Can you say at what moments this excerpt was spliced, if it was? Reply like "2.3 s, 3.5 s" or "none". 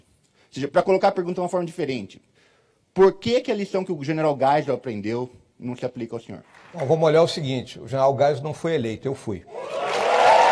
6.6 s, 9.5 s

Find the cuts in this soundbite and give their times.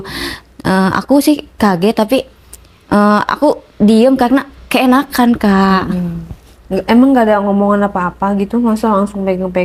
none

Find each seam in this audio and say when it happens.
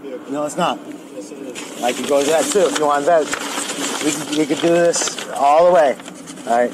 none

